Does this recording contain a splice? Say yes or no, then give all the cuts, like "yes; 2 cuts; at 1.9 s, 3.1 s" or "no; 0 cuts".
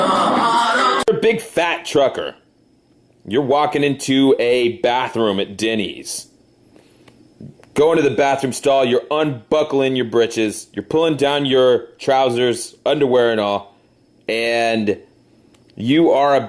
no; 0 cuts